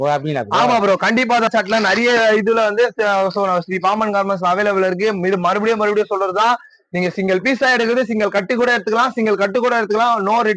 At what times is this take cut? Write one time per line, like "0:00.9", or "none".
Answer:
0:01.5